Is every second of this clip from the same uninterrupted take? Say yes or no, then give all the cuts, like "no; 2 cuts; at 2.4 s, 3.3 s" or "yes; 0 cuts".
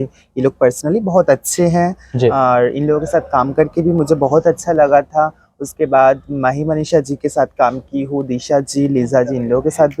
yes; 0 cuts